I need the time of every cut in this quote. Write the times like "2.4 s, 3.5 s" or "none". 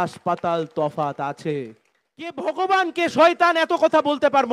2.4 s